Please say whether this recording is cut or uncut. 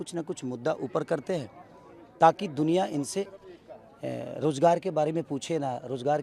uncut